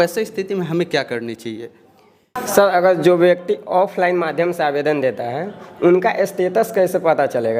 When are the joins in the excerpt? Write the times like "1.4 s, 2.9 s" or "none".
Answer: 2.3 s